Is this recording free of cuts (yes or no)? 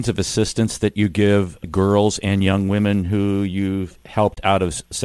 no